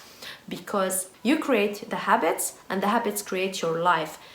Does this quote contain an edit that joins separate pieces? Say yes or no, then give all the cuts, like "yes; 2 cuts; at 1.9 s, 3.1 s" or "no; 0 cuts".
yes; 1 cut; at 1.1 s